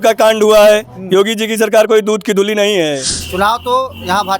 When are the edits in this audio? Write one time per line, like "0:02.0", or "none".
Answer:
0:03.1